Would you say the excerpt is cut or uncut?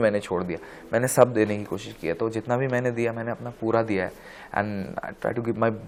uncut